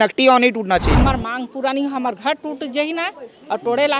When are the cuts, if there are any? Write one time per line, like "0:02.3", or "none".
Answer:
0:01.0